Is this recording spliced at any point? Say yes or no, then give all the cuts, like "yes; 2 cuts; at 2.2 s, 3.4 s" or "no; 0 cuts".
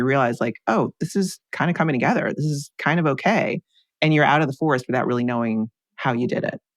yes; 2 cuts; at 1.4 s, 5.8 s